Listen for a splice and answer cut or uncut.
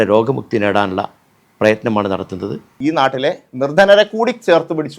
cut